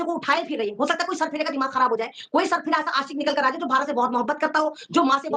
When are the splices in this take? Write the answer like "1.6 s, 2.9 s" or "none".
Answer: none